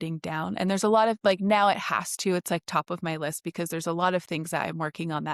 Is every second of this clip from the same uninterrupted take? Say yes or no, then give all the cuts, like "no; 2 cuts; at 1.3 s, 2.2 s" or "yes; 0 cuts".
yes; 0 cuts